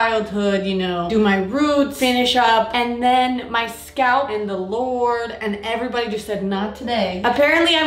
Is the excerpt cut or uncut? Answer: uncut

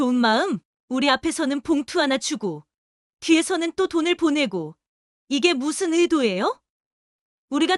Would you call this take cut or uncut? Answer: uncut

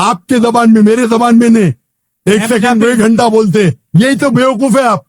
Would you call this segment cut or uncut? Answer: uncut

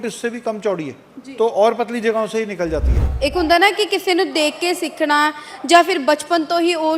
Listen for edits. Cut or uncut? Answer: cut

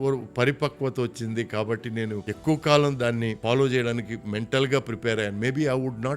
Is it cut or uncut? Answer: cut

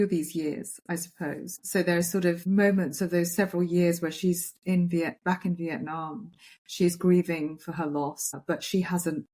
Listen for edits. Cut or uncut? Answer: cut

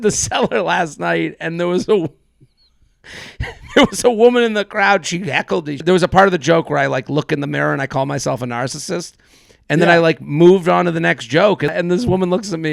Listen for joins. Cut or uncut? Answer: cut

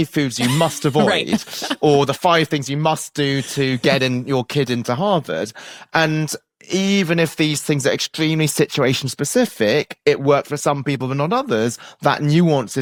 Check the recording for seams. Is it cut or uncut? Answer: uncut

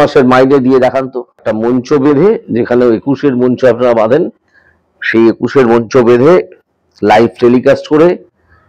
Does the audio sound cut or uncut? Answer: cut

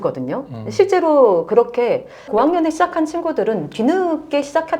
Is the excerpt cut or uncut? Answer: cut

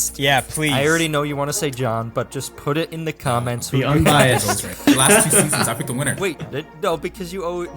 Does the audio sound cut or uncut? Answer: cut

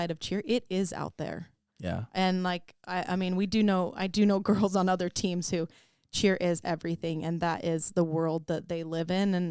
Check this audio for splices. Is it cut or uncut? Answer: uncut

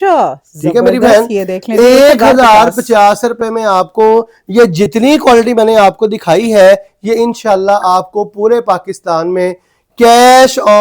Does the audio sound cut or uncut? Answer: uncut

